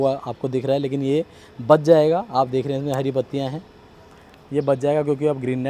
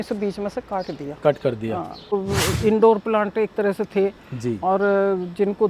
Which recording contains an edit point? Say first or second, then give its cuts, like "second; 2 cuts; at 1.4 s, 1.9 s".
second; 1 cut; at 2.1 s